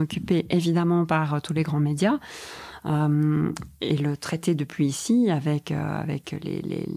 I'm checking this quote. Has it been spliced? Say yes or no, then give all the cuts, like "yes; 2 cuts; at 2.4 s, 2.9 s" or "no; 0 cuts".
no; 0 cuts